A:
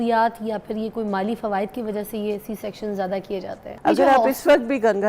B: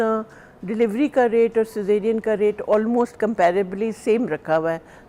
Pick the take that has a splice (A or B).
A